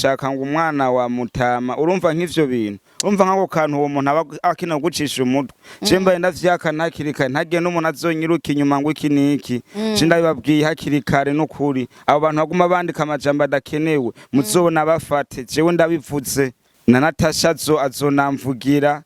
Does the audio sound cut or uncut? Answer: cut